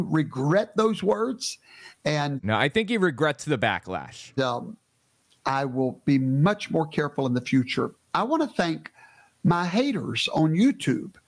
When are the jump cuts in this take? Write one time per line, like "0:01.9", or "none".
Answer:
none